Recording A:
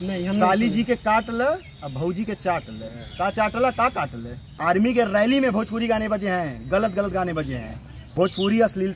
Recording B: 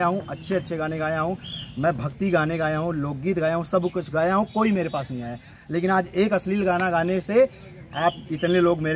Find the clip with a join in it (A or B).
A